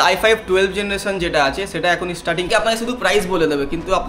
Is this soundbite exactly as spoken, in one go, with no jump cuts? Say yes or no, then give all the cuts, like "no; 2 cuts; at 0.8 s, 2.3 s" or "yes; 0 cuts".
no; 1 cut; at 2.5 s